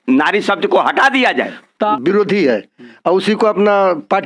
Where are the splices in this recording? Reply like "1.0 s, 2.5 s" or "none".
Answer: 1.9 s